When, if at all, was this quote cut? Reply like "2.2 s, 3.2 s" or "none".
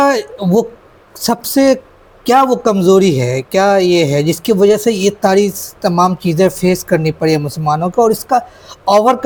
none